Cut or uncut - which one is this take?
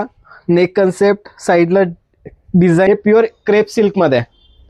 cut